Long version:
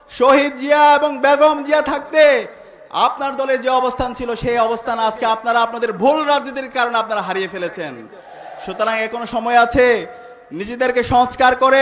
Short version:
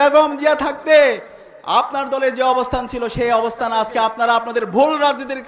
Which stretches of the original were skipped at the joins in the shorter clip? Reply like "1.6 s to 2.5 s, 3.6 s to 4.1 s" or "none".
none